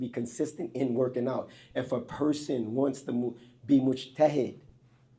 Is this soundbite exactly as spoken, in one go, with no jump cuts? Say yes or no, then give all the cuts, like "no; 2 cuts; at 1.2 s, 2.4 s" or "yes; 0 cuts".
yes; 0 cuts